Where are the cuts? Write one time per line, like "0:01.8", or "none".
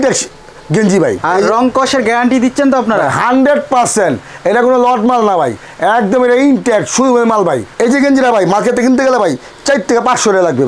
0:01.2
0:07.7